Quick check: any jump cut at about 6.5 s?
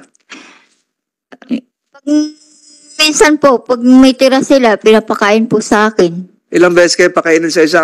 no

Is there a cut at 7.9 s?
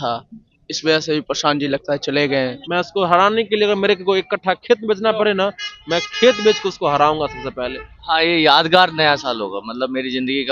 yes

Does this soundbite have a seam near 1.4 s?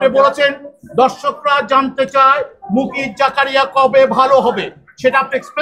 no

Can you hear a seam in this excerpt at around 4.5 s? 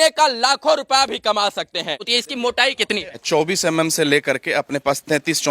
no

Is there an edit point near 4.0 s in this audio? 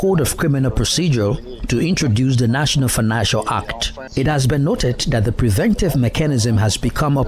yes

